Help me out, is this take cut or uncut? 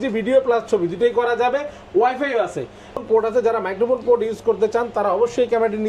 cut